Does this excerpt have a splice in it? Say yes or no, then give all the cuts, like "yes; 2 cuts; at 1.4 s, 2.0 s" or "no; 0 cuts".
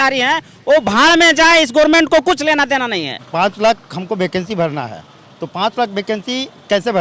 yes; 1 cut; at 3.1 s